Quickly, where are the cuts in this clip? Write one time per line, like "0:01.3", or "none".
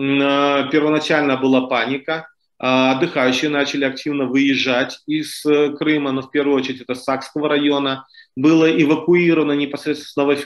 none